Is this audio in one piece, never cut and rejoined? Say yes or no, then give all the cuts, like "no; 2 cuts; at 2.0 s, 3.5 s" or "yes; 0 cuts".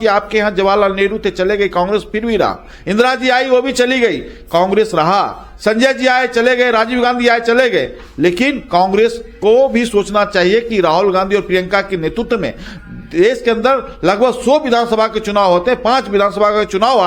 yes; 0 cuts